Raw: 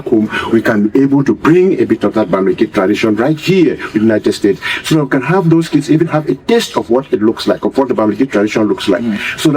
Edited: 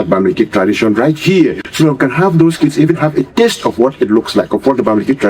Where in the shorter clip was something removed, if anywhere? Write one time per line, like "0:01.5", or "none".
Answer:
0:01.6